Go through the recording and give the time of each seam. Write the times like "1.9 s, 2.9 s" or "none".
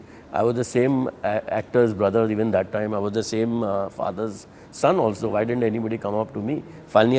none